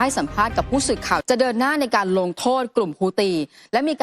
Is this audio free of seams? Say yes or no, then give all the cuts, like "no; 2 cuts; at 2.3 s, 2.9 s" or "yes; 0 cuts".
no; 1 cut; at 1.2 s